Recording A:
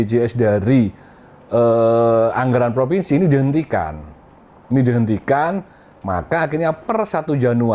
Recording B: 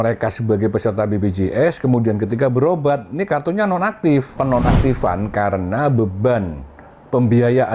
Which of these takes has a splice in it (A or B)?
B